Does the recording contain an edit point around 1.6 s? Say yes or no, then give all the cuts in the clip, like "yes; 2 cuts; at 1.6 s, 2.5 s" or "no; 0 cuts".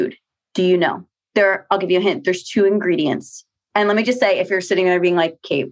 no; 0 cuts